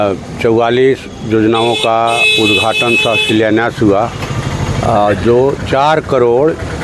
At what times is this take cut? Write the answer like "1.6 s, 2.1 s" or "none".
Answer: none